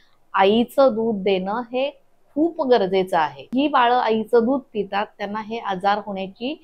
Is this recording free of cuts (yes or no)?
no